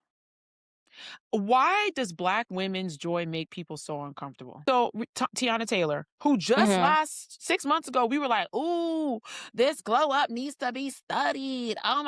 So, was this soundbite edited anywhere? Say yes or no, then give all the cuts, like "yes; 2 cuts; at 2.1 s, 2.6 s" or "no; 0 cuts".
yes; 1 cut; at 4.5 s